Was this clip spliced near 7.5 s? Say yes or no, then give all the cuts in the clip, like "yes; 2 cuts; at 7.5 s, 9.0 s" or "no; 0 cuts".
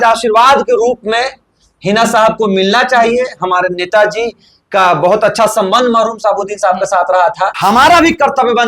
yes; 1 cut; at 7.5 s